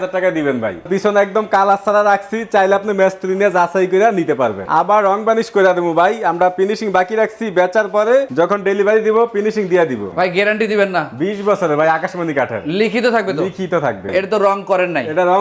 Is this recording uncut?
no; 5 cuts; at 0.8 s, 4.6 s, 8.3 s, 10.1 s, 14.0 s

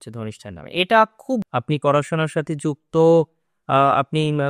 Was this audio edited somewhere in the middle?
yes; 1 cut; at 1.5 s

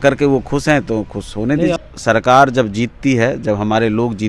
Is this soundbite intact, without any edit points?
no; 1 cut; at 1.8 s

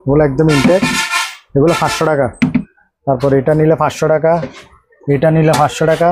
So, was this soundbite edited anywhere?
yes; 1 cut; at 2.7 s

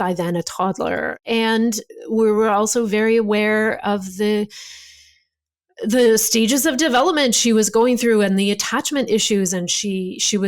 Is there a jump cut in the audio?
yes; 1 cut; at 1.2 s

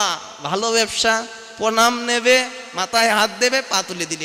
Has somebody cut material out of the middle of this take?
no; 0 cuts

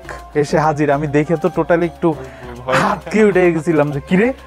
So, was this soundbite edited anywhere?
no; 0 cuts

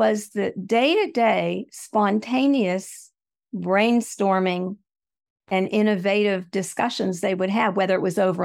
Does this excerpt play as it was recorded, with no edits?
yes; 0 cuts

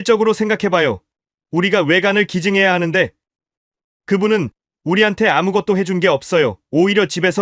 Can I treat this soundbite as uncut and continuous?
yes; 0 cuts

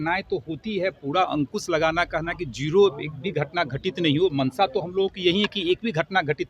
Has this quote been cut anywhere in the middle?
no; 0 cuts

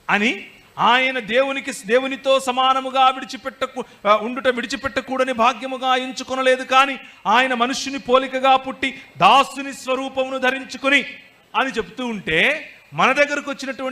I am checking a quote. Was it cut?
yes; 1 cut; at 5.3 s

